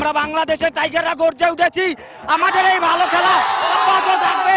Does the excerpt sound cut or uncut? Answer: uncut